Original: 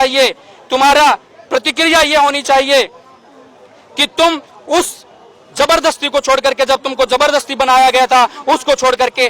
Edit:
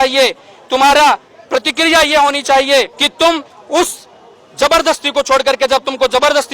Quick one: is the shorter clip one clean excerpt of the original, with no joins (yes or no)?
no